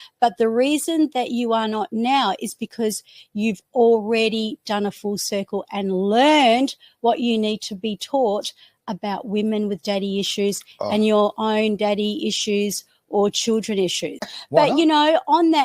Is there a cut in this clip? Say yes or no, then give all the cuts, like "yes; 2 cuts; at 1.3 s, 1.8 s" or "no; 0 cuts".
yes; 1 cut; at 14.4 s